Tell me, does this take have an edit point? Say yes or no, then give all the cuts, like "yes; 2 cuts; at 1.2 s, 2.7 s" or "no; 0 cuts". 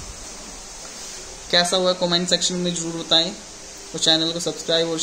no; 0 cuts